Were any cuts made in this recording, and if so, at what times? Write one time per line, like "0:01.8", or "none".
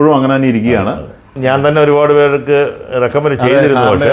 0:01.3